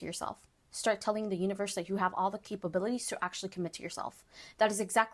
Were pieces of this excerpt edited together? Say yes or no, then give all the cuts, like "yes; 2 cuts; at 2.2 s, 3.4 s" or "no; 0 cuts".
no; 0 cuts